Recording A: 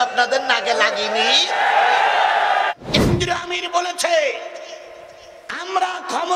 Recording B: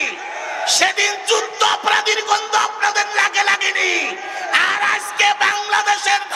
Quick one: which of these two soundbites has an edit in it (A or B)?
A